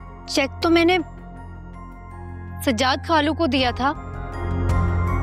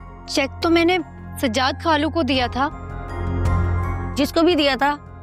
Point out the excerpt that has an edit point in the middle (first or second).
second